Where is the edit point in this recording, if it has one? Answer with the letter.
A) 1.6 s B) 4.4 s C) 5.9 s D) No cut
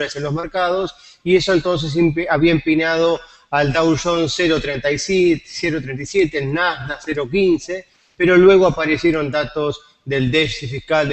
C